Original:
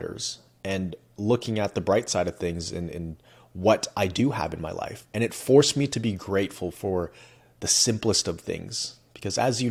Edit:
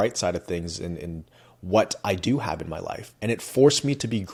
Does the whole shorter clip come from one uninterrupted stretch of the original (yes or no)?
yes